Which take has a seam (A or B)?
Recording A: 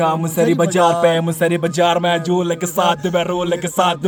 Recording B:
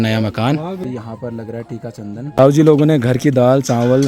B